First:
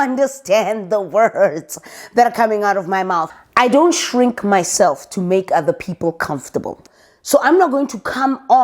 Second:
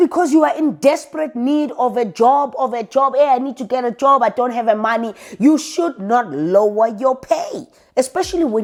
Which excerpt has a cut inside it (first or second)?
first